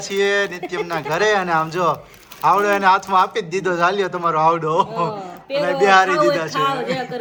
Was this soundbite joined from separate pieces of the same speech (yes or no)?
no